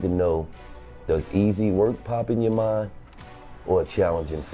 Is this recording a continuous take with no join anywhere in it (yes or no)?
yes